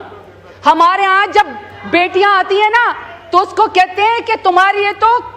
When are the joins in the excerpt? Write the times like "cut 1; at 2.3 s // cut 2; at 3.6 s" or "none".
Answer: none